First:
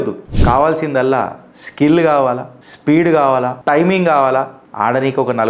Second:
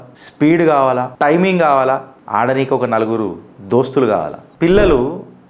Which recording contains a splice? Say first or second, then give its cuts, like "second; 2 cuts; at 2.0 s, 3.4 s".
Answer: second; 1 cut; at 4.4 s